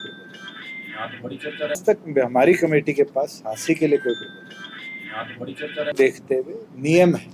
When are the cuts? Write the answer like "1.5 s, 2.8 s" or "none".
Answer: 1.8 s, 5.9 s